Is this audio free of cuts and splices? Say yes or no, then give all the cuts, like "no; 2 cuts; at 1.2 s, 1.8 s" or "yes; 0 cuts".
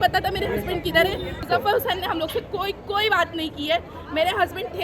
no; 1 cut; at 1.4 s